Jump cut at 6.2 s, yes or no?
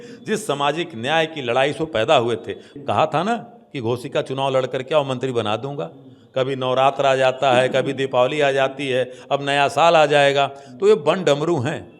no